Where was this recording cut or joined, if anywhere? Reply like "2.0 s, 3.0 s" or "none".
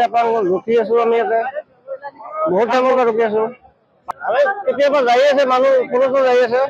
4.0 s